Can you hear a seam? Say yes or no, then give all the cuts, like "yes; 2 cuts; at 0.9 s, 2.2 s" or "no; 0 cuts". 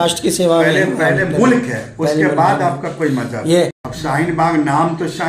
yes; 1 cut; at 3.9 s